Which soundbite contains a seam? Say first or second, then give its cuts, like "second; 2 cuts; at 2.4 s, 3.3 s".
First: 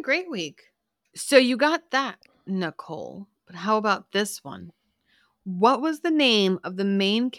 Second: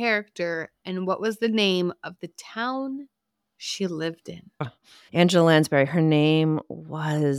second; 1 cut; at 4.6 s